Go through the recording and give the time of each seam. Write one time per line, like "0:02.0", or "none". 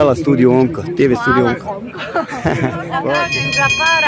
0:03.2